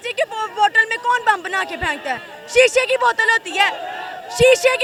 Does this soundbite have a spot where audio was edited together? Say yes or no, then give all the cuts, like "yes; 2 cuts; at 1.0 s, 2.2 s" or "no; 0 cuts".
no; 0 cuts